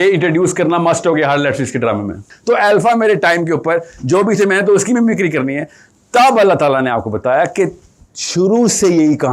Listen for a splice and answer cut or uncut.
cut